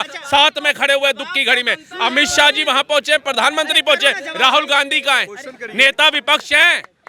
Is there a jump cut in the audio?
no; 0 cuts

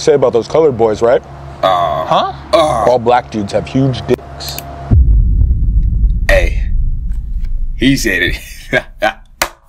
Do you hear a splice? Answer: no; 0 cuts

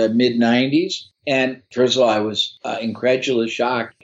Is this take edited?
no; 0 cuts

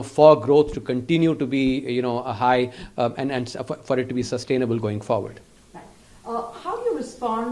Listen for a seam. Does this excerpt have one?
no; 0 cuts

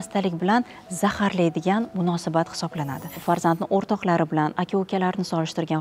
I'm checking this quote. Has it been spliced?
yes; 1 cut; at 3.1 s

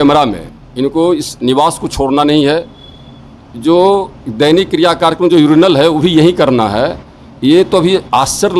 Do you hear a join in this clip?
no; 0 cuts

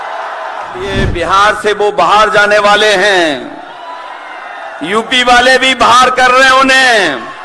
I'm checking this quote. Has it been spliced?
yes; 1 cut; at 0.9 s

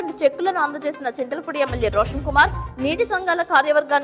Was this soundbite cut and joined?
no; 0 cuts

